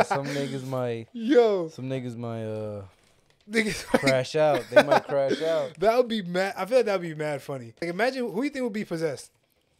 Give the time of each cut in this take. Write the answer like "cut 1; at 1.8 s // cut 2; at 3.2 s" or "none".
cut 1; at 7.8 s